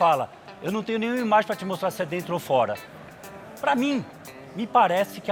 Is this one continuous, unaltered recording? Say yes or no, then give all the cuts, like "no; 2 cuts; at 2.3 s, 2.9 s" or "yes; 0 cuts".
yes; 0 cuts